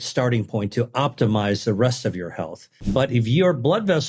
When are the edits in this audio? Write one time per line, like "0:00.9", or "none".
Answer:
none